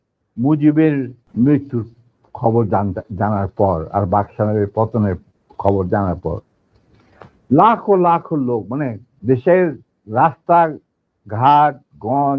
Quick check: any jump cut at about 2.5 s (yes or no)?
no